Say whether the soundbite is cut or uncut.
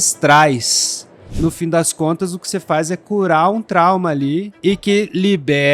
cut